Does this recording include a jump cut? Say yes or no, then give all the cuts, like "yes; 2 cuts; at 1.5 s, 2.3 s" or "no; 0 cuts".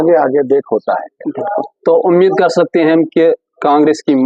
no; 0 cuts